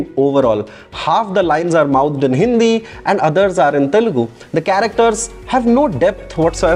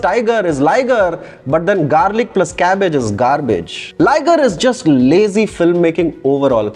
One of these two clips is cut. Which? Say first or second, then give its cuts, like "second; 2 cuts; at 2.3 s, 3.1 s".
second; 1 cut; at 3.9 s